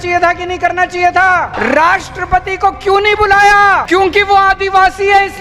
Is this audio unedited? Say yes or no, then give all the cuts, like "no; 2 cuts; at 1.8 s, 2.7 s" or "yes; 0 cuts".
no; 2 cuts; at 1.5 s, 3.8 s